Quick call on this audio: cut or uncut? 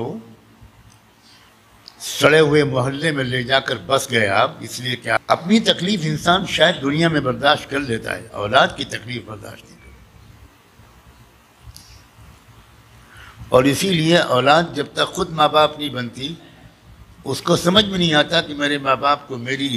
cut